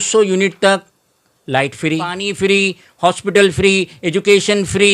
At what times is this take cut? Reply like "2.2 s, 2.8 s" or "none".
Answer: 2.2 s